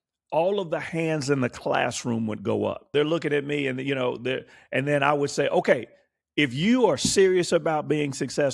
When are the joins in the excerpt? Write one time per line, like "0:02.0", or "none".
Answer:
0:02.9